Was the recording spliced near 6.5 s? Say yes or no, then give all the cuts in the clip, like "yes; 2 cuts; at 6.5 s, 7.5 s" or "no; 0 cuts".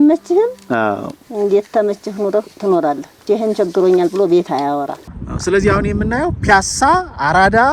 no; 2 cuts; at 3.1 s, 5.1 s